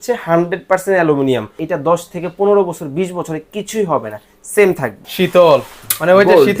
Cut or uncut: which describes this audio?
cut